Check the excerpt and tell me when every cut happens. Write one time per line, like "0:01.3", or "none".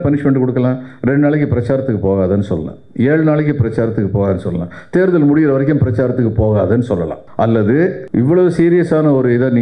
0:07.2
0:08.0